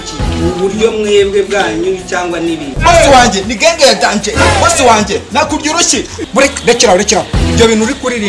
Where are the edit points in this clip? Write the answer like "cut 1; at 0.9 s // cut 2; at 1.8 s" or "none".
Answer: cut 1; at 2.7 s